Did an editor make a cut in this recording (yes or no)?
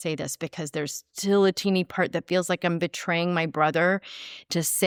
no